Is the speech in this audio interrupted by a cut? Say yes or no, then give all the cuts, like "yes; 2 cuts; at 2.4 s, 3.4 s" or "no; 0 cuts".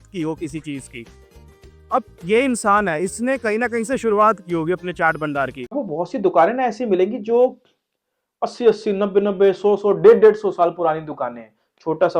yes; 1 cut; at 5.7 s